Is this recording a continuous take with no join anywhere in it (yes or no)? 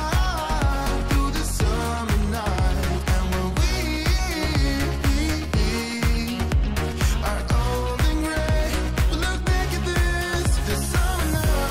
yes